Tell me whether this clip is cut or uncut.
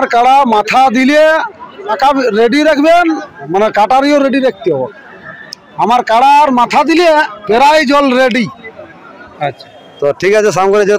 cut